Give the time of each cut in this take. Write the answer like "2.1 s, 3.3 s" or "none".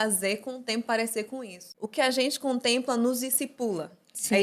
1.6 s